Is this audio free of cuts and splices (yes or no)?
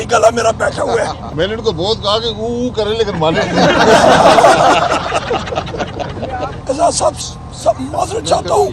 no